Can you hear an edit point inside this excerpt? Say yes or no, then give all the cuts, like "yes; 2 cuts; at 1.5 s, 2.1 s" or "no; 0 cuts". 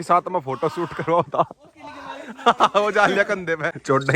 no; 0 cuts